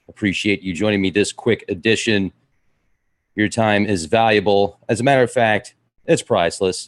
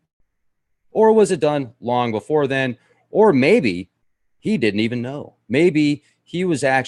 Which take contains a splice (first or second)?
second